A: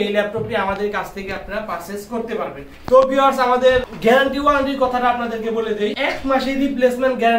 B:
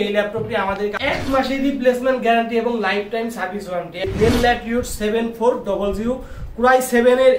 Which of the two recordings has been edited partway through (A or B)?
B